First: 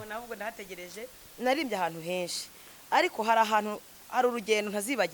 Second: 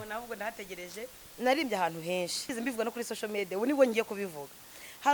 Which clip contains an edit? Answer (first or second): second